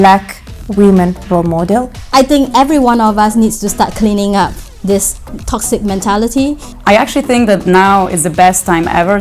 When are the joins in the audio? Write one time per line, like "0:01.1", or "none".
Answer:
0:02.0
0:06.7